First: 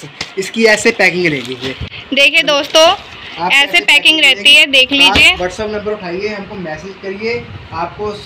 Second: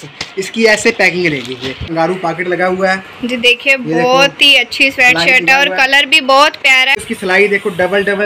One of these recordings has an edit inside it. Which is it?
second; 2 cuts; at 2.0 s, 7.1 s

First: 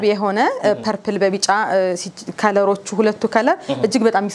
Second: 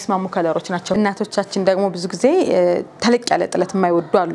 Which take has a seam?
second; 1 cut; at 1.0 s

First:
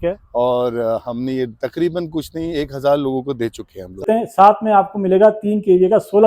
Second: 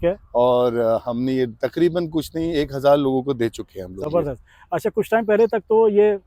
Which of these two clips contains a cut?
first; 1 cut; at 4.0 s

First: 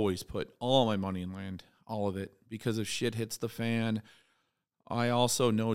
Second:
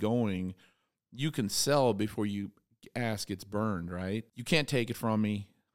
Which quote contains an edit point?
second; 1 cut; at 4.3 s

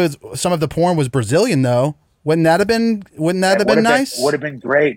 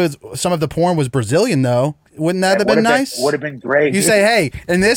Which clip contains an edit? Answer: second; 2 cuts; at 2.1 s, 3.9 s

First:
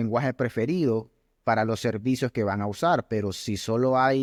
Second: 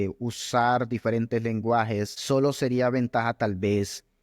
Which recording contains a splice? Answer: second; 1 cut; at 2.2 s

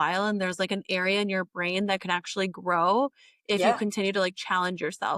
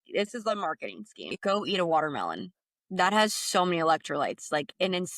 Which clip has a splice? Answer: second; 1 cut; at 1.2 s

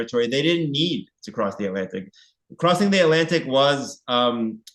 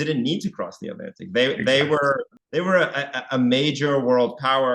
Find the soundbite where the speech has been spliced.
second; 1 cut; at 2.3 s

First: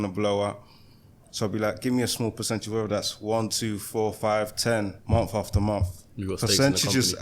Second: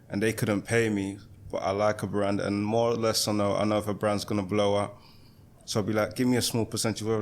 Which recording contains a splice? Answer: first; 1 cut; at 5.0 s

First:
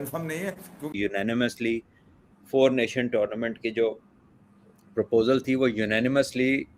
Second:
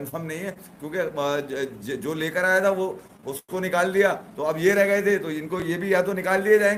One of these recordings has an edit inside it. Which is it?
first; 1 cut; at 0.9 s

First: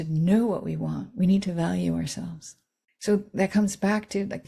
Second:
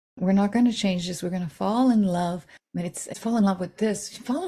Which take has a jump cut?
second; 1 cut; at 3.2 s

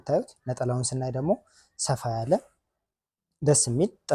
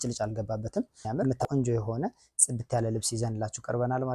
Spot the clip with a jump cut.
second; 1 cut; at 1.4 s

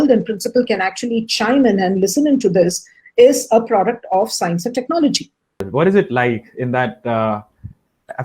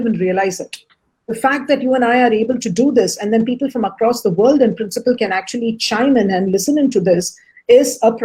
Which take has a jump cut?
first; 1 cut; at 5.6 s

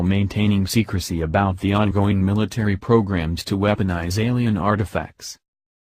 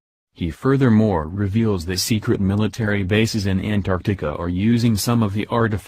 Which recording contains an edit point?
second; 1 cut; at 2.7 s

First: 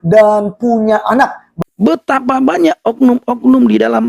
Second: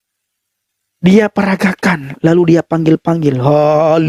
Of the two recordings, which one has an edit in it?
first; 1 cut; at 1.4 s

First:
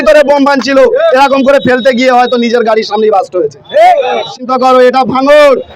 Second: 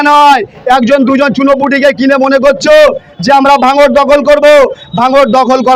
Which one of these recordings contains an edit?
first; 1 cut; at 4.3 s

